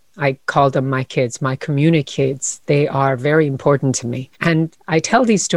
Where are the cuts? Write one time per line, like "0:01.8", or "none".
none